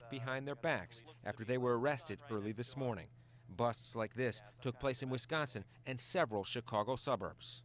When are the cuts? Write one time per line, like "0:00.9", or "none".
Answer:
none

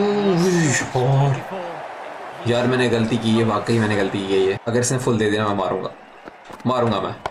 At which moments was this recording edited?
0:02.3
0:04.6

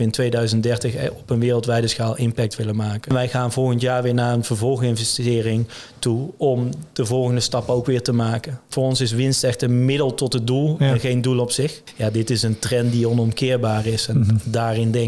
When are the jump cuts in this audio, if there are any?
0:03.1
0:08.6
0:11.9

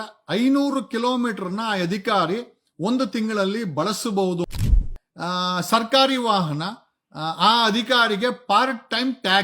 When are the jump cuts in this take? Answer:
0:04.6

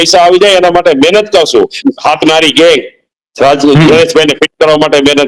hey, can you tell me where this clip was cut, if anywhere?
0:01.8

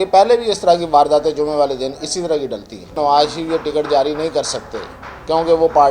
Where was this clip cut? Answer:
0:03.0

